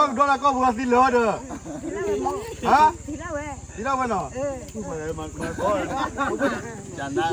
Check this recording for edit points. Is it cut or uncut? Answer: uncut